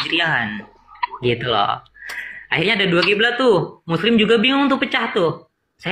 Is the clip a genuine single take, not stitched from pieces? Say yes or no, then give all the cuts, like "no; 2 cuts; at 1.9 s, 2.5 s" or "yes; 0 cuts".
yes; 0 cuts